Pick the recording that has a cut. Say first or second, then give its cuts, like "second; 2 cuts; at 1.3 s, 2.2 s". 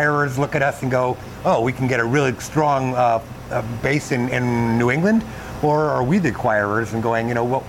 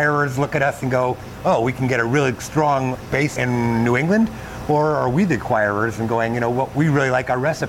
second; 1 cut; at 3.0 s